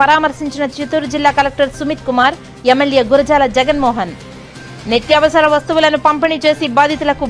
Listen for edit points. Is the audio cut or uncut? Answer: uncut